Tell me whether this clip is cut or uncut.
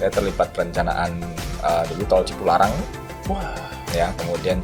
uncut